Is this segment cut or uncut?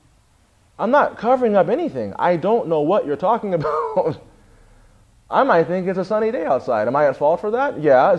uncut